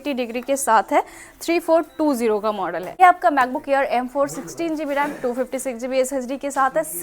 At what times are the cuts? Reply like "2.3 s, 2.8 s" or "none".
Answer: 2.9 s